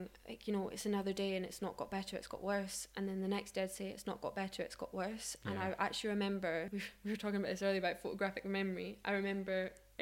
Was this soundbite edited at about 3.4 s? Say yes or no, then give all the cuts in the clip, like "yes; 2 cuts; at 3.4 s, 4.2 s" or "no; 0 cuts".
no; 1 cut; at 6.7 s